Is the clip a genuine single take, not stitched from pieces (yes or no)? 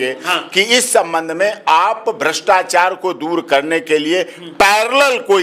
yes